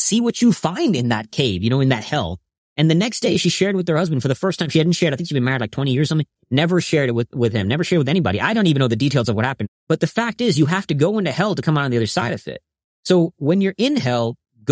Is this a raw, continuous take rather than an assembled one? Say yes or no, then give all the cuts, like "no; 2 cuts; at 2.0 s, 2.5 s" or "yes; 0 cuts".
no; 2 cuts; at 1.3 s, 9.6 s